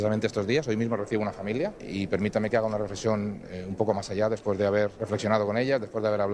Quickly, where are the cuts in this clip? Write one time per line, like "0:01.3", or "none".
0:01.8
0:05.0